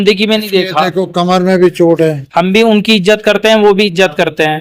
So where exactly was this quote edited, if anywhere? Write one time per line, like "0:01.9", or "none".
0:02.2

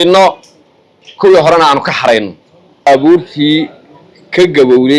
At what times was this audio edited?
0:02.9

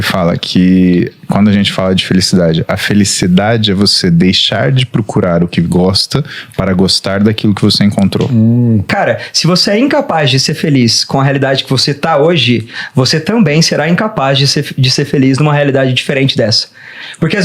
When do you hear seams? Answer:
0:08.9

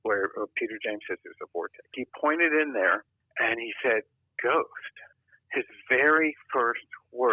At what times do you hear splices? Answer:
0:02.0

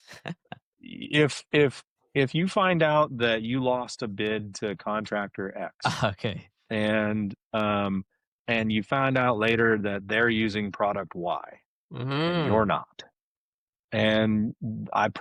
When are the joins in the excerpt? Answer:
none

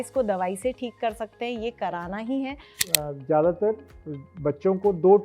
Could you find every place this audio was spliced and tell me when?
0:02.8

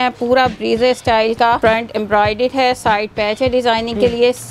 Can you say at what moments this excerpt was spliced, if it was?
0:01.6

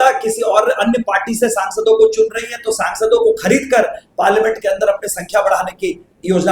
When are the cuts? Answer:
none

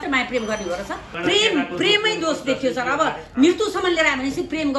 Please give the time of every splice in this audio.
0:01.1

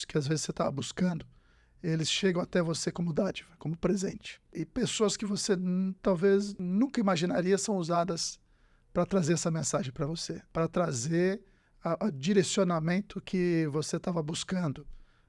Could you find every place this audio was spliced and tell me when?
0:04.6
0:06.6
0:10.3

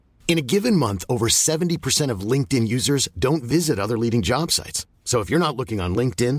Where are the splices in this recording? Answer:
none

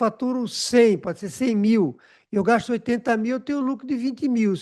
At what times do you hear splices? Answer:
none

